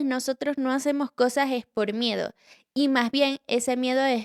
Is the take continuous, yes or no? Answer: yes